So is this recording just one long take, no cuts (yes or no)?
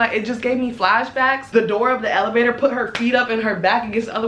no